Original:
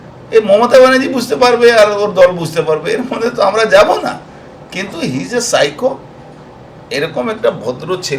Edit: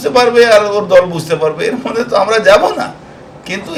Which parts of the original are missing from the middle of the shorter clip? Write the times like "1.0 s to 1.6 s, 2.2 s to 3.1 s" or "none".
none